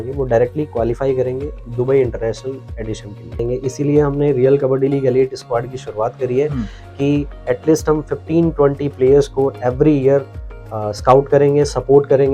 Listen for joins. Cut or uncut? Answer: cut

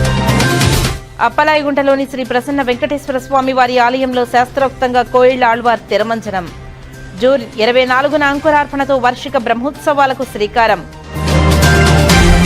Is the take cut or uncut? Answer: cut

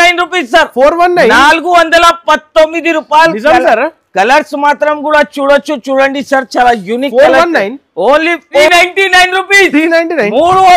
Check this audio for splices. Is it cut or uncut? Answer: cut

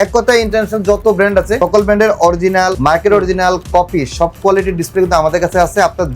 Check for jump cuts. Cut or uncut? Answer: cut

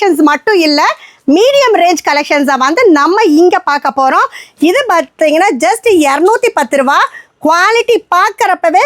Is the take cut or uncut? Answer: uncut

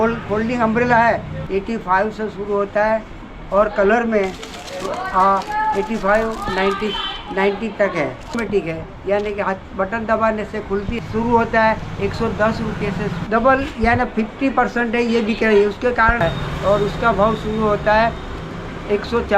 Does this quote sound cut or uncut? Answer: cut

